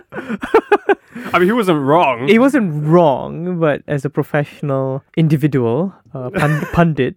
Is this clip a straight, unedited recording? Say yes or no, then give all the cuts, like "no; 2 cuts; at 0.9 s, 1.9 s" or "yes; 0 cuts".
yes; 0 cuts